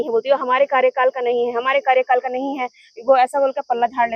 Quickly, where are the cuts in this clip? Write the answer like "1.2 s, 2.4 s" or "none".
none